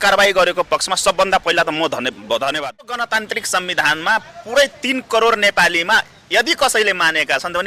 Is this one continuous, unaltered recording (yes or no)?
no